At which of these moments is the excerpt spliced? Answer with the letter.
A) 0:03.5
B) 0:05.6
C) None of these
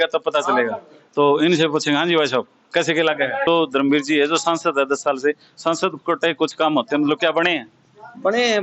A